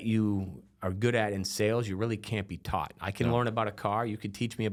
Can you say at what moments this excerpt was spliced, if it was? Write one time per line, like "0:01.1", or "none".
none

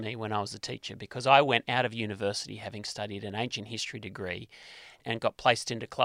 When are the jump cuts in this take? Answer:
0:05.0

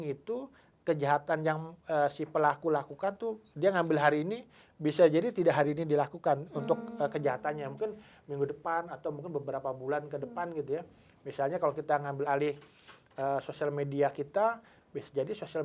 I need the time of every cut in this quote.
0:12.3

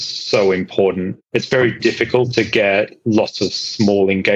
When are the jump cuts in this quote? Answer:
0:01.2

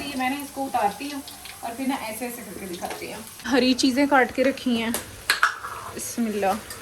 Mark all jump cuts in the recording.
0:03.5

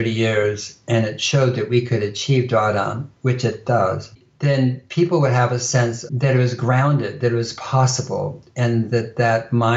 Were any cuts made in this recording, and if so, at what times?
0:04.1
0:06.0

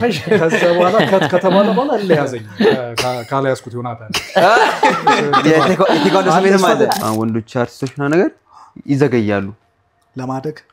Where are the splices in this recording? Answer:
0:07.0

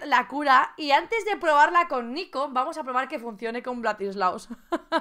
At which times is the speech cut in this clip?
none

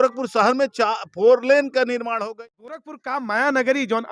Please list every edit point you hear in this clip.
0:02.9

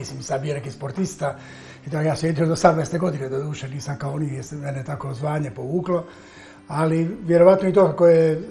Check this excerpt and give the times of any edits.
none

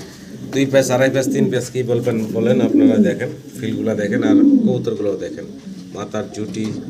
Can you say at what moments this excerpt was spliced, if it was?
none

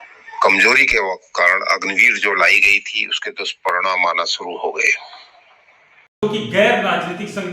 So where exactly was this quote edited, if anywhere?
0:06.2

